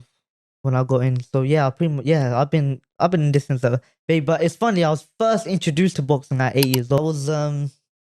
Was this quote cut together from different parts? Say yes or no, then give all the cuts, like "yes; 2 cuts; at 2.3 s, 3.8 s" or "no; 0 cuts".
yes; 1 cut; at 7.0 s